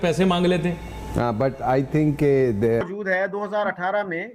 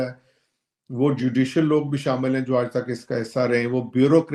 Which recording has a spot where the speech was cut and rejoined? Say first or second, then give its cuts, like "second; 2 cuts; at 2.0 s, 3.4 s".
first; 1 cut; at 2.8 s